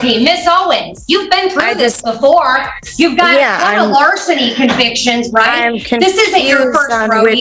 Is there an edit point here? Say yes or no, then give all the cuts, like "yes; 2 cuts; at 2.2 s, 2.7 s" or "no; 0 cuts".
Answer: no; 0 cuts